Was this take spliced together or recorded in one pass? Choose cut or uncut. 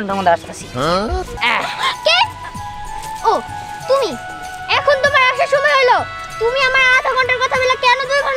cut